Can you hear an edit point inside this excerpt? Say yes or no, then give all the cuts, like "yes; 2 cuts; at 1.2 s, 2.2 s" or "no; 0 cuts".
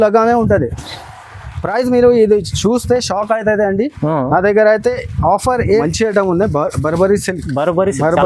yes; 1 cut; at 5.8 s